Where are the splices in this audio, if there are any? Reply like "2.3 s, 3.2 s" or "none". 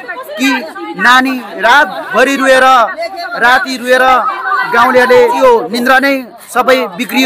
5.4 s